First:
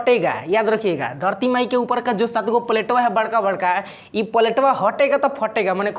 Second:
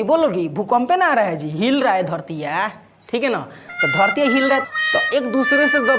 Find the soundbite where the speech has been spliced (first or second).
second